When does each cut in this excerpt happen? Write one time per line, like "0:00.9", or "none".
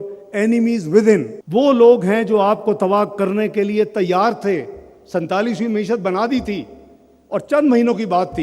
0:01.4